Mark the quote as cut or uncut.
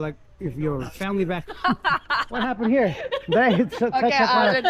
uncut